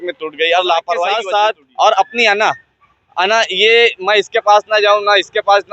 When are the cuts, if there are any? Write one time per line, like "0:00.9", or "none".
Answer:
0:01.2